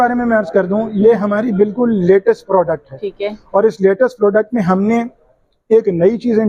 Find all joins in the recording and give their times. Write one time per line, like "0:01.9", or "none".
none